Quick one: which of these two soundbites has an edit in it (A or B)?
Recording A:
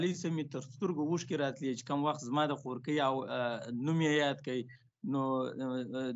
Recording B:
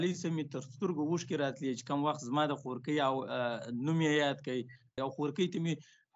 B